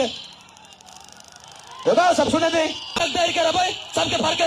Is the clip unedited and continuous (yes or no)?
no